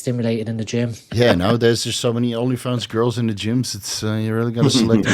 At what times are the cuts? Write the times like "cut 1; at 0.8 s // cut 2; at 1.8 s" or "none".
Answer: cut 1; at 1.0 s